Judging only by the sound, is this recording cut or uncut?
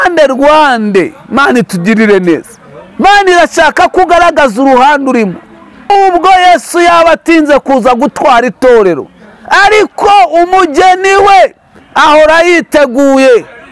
cut